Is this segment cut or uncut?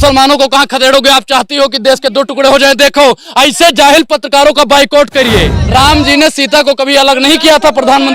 cut